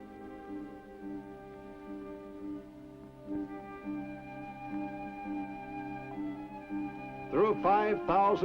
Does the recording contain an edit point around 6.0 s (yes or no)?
yes